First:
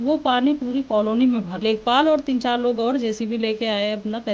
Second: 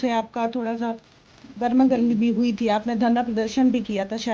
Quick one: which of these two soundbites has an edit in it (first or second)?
first